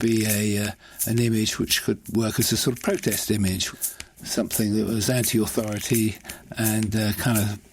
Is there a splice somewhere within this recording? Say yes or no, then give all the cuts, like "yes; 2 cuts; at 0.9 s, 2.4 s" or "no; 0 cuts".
yes; 1 cut; at 3.6 s